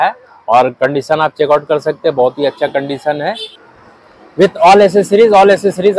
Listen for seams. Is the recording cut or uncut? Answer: cut